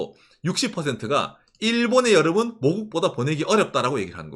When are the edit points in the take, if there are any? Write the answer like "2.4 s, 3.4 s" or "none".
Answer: none